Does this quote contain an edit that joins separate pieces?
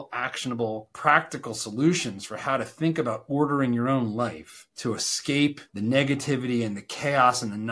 no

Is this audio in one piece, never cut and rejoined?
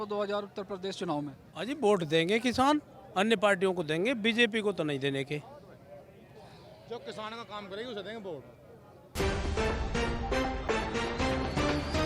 no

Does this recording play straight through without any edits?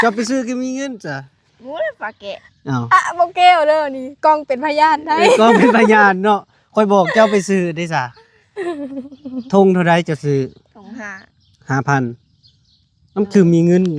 yes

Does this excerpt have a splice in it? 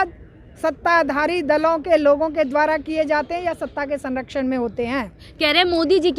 no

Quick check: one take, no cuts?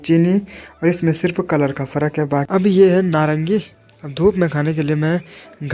no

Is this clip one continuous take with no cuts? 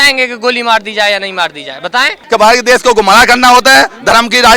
no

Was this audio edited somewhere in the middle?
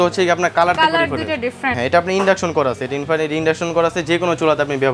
yes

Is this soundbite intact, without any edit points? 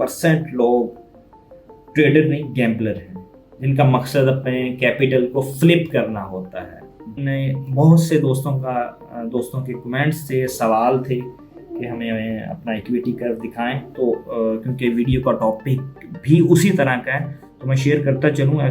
no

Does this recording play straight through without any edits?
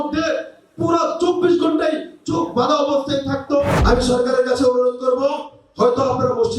no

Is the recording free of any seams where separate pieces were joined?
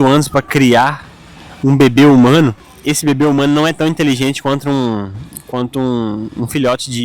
no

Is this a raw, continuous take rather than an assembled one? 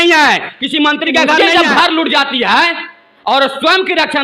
no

